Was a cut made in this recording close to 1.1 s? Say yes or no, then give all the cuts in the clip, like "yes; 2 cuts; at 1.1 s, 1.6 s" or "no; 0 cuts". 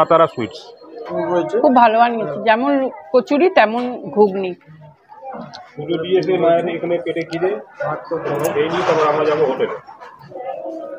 yes; 1 cut; at 1.1 s